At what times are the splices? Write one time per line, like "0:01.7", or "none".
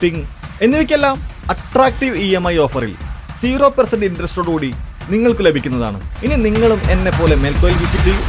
0:06.1